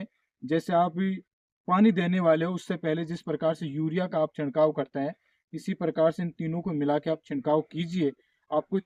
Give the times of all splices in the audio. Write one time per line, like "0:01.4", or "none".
none